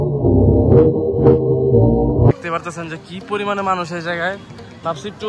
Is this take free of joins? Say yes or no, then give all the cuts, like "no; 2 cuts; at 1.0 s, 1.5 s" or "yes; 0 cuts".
no; 1 cut; at 2.3 s